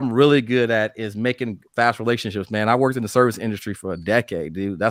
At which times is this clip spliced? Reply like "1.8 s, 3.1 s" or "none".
none